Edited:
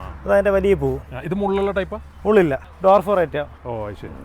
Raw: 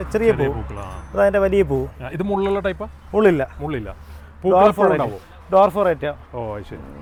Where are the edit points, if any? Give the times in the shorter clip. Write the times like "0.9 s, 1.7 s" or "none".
2.7 s